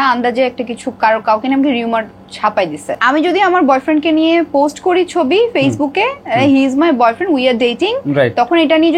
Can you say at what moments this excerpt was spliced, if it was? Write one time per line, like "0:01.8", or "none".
0:03.0